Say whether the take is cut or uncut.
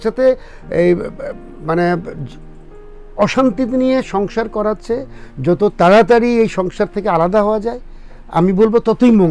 uncut